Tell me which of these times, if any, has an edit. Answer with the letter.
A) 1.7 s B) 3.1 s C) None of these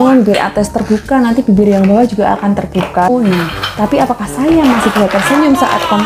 B